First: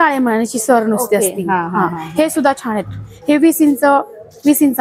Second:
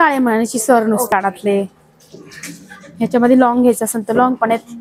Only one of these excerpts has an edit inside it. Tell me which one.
second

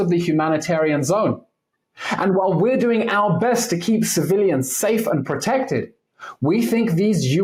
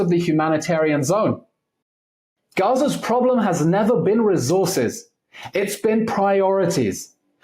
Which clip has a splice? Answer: second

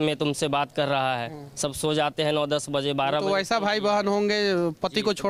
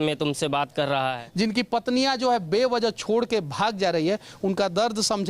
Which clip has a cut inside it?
second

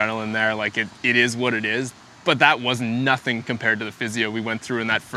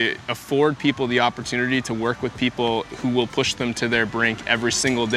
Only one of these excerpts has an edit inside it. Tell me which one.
first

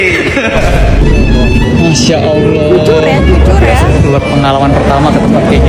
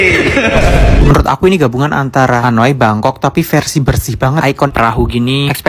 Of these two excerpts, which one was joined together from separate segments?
second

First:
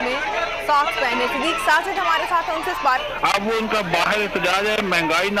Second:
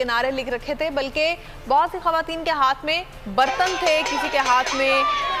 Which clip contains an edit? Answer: first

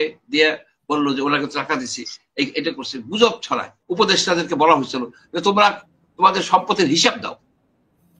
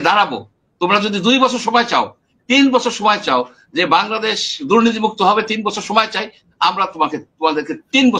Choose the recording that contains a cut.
first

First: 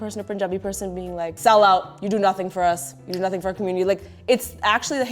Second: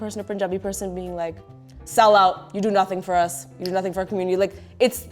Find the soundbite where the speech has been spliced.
first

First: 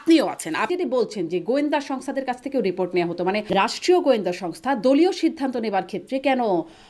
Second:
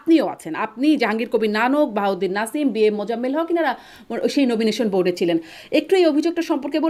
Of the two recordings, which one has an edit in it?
first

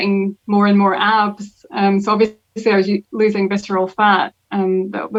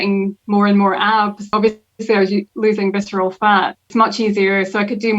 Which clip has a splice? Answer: second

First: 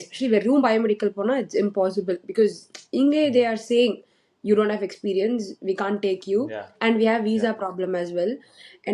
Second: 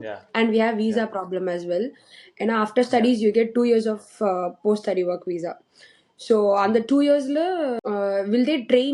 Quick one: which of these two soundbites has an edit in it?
second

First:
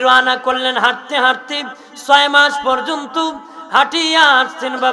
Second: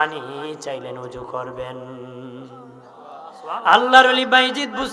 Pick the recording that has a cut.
second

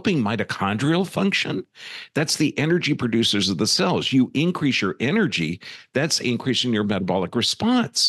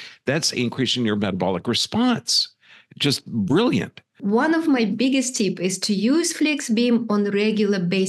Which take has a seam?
second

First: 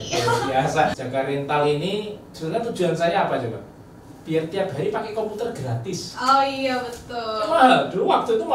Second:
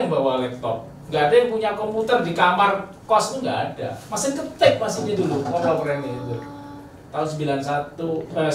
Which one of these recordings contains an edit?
first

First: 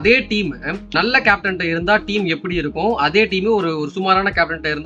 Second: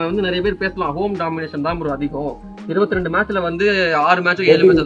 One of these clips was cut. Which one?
first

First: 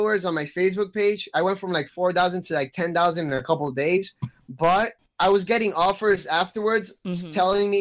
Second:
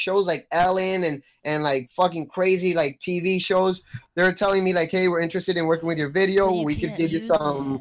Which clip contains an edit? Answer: first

